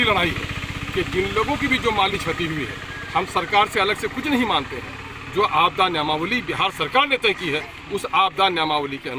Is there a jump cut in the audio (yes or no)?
no